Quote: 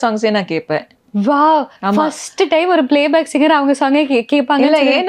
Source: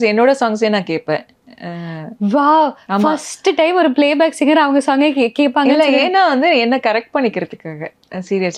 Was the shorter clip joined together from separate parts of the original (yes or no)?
yes